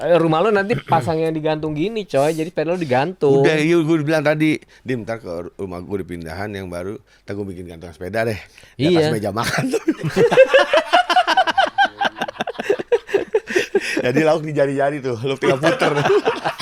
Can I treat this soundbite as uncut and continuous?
yes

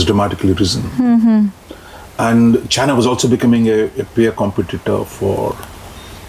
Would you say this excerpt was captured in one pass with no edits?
yes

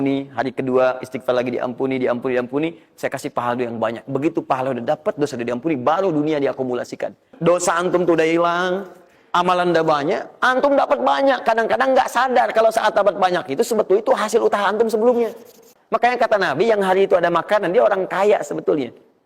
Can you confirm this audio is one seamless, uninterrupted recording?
no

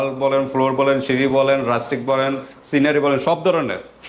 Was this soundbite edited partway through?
no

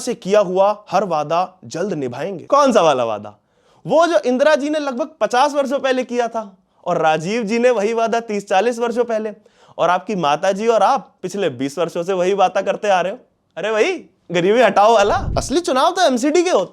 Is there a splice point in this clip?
yes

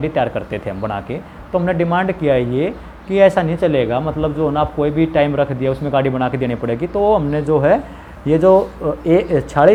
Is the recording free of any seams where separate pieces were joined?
yes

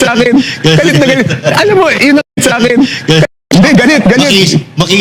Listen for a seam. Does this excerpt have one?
no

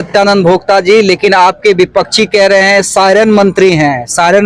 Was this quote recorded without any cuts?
yes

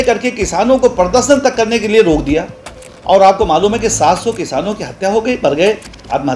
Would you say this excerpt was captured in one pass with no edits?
yes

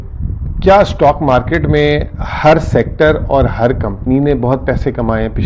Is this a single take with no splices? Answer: yes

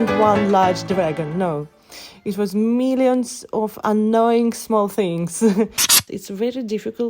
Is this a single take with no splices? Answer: no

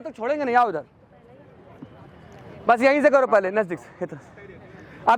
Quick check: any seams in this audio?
no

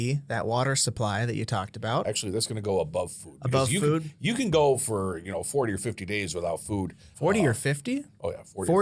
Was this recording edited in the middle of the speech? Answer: yes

